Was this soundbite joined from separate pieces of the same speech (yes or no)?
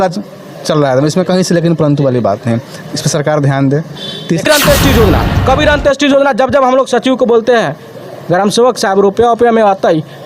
yes